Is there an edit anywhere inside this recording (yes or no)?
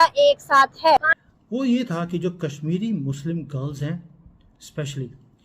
yes